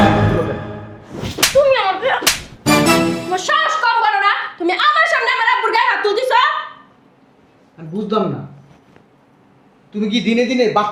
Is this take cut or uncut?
uncut